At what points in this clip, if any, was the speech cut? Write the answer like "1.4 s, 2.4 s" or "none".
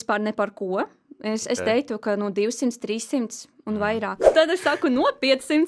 4.2 s

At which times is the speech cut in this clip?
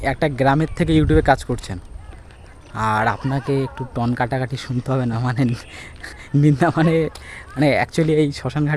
none

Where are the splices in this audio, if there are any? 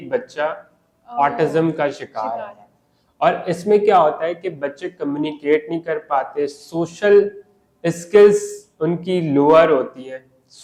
none

